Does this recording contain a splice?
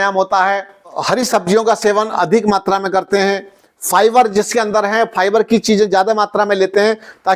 yes; 1 cut; at 1.0 s

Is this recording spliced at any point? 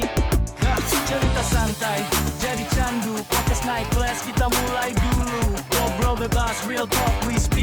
no; 0 cuts

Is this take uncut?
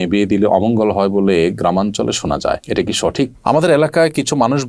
no; 1 cut; at 3.4 s

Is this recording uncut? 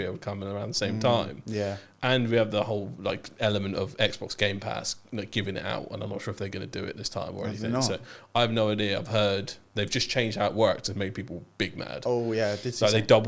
yes; 0 cuts

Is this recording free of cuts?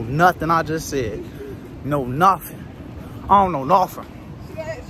yes; 0 cuts

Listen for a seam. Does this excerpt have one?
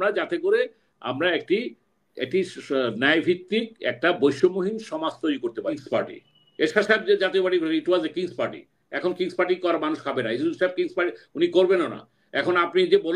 yes; 1 cut; at 5.8 s

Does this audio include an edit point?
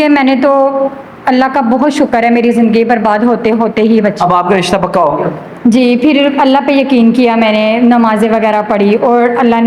no; 0 cuts

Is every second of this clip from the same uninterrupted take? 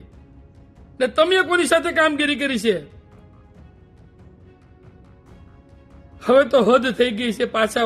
yes; 0 cuts

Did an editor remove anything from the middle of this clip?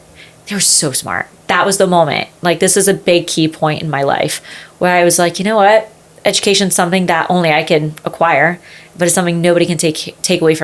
yes; 1 cut; at 1.3 s

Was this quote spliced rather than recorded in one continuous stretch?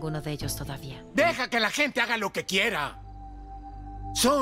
yes; 1 cut; at 0.9 s

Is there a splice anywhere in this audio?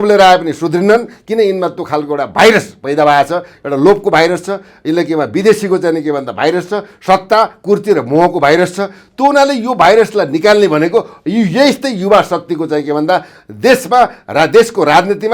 no; 0 cuts

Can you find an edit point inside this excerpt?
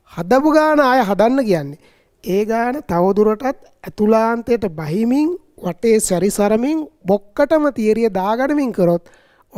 no; 0 cuts

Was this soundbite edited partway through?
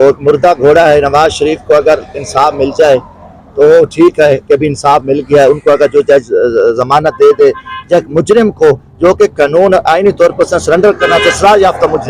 no; 0 cuts

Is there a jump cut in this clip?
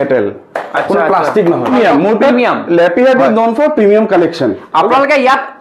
yes; 1 cut; at 1.7 s

